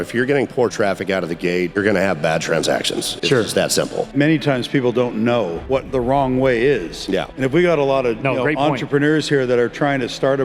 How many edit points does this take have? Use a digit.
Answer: 3